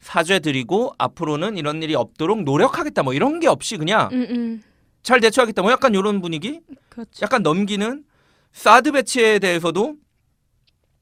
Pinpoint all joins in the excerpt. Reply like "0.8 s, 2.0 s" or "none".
none